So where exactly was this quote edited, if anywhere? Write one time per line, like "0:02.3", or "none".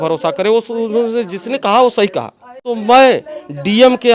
0:02.8